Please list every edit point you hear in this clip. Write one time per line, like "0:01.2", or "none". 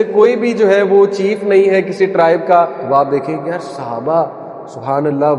0:02.8